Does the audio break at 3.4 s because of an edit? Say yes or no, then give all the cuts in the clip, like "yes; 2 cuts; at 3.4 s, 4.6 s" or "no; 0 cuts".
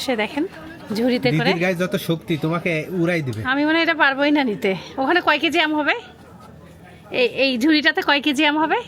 no; 0 cuts